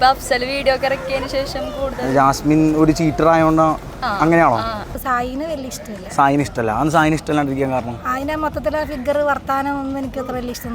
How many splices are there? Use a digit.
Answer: 1